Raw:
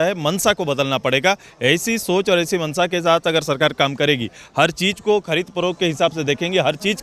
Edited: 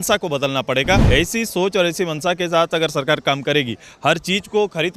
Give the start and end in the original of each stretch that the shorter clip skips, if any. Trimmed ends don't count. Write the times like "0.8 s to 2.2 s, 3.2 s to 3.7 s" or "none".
1.4 s to 1.6 s